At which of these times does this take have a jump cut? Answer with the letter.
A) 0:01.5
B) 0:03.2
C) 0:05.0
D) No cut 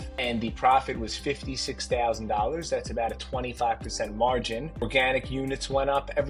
D